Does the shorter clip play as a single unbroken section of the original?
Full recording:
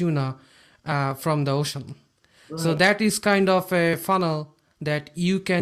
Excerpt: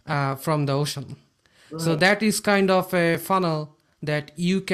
yes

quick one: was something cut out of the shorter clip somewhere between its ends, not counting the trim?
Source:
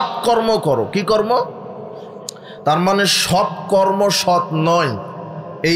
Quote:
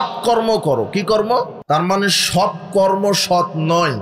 yes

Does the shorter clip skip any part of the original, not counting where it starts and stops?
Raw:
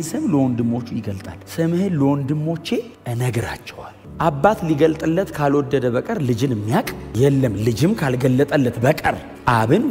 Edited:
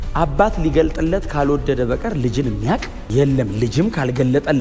no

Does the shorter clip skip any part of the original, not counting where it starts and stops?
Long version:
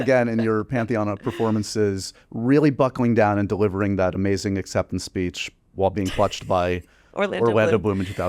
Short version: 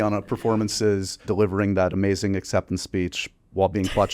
yes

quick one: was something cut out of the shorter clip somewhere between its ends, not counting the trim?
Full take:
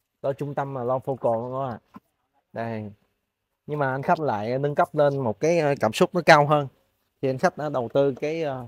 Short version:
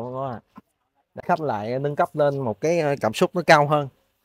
yes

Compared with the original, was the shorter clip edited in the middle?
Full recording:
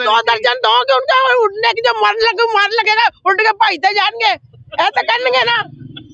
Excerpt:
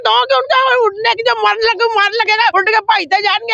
yes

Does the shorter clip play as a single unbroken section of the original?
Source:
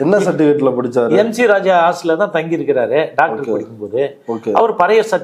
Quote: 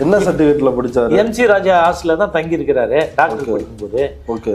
yes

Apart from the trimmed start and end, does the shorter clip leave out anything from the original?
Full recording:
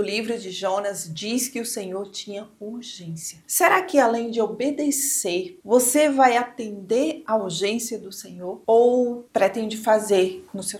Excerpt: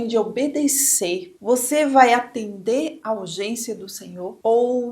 no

